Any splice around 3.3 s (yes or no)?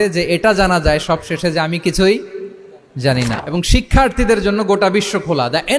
yes